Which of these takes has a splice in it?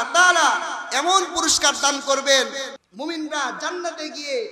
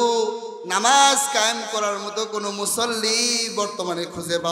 first; 1 cut; at 2.8 s

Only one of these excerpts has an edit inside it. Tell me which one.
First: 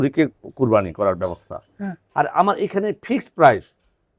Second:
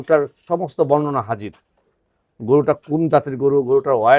first; 1 cut; at 2.0 s

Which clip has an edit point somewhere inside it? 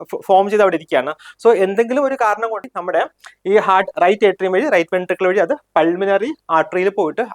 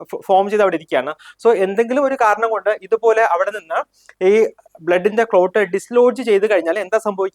first; 1 cut; at 2.6 s

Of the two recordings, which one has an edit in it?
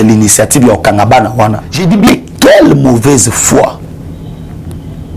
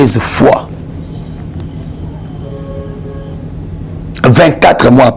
first; 1 cut; at 1.7 s

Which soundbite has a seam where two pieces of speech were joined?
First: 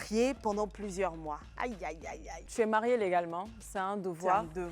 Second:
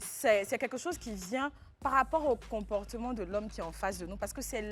first; 1 cut; at 2.4 s

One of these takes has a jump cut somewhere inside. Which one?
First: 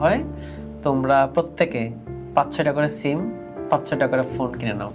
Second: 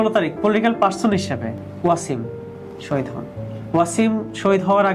second; 1 cut; at 1.7 s

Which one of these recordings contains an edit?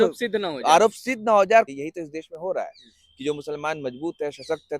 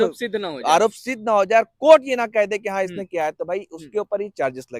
first; 1 cut; at 1.7 s

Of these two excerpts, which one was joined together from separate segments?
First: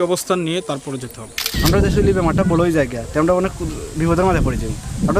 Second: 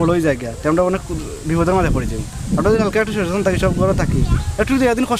first; 1 cut; at 1.5 s

